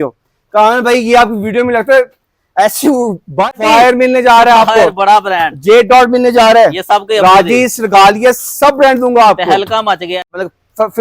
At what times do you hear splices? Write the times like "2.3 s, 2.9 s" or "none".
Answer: 3.5 s, 10.2 s